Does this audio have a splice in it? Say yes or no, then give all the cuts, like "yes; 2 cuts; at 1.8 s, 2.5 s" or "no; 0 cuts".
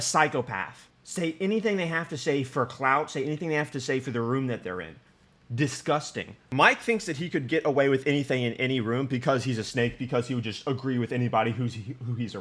yes; 1 cut; at 6.5 s